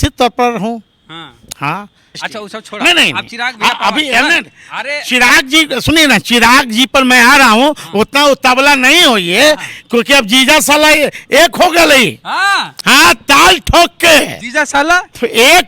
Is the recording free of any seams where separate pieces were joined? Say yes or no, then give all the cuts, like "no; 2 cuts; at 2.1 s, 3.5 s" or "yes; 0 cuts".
no; 1 cut; at 2.2 s